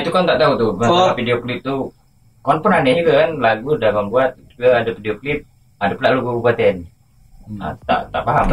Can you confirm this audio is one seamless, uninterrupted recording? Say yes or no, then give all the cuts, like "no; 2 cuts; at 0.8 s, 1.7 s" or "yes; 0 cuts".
yes; 0 cuts